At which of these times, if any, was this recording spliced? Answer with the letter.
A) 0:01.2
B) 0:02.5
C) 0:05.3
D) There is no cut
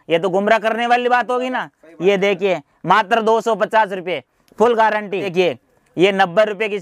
C